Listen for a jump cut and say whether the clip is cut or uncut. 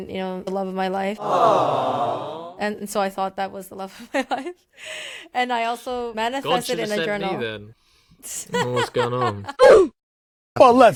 uncut